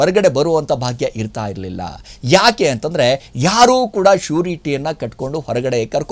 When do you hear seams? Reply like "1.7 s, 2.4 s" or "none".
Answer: none